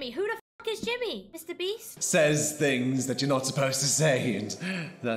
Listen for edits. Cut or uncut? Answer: cut